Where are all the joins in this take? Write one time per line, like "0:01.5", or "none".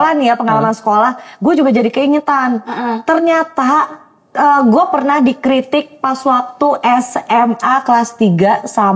none